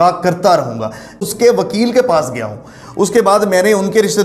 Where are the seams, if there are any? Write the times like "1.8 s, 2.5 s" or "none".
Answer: 1.2 s